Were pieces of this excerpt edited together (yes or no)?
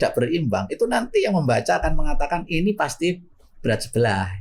no